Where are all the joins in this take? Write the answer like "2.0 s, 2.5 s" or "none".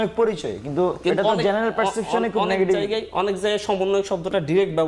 none